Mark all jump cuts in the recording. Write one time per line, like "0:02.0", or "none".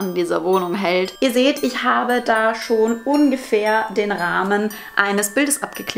0:01.1